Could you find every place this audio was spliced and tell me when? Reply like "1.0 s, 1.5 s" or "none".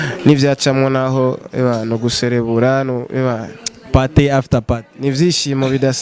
none

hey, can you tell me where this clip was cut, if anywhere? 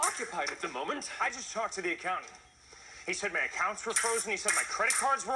3.9 s

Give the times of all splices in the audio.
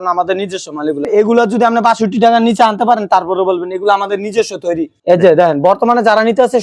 1.0 s, 4.9 s

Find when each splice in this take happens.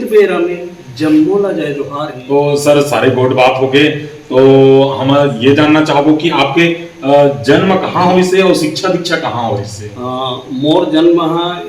2.3 s

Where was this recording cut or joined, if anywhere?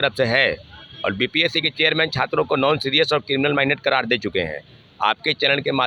none

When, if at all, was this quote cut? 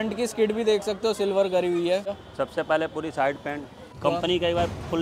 2.2 s, 3.9 s

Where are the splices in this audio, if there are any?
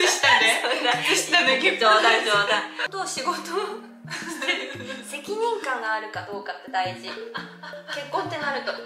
2.8 s

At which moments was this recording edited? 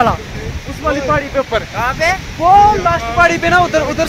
none

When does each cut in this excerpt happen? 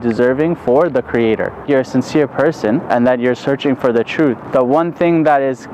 1.6 s, 2.9 s, 4.4 s

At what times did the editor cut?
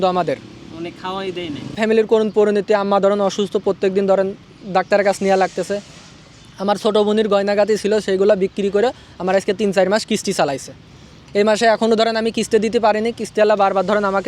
1.8 s

